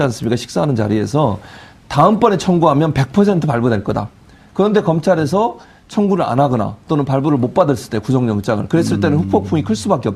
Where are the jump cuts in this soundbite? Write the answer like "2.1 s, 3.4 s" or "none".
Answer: 5.4 s